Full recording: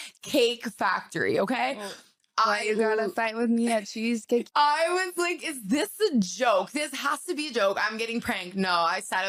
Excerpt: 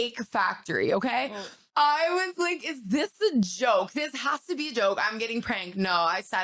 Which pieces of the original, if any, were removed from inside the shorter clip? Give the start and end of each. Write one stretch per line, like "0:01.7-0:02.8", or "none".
0:02.2-0:04.5